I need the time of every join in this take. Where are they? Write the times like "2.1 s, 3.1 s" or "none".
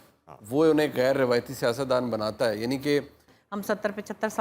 3.3 s